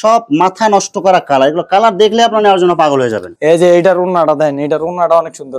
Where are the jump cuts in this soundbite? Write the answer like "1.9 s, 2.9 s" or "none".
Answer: none